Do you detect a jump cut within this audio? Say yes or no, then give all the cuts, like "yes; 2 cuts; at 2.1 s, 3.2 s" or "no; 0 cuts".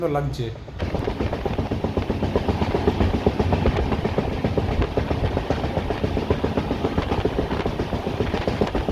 no; 0 cuts